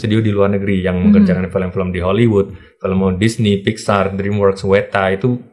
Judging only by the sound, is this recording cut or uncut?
uncut